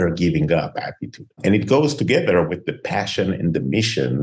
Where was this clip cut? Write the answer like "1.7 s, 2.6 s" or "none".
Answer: none